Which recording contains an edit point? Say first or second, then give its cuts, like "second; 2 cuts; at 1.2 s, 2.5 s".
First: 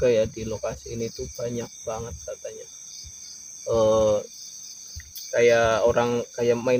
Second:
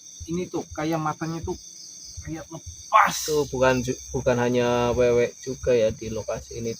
second; 1 cut; at 3.2 s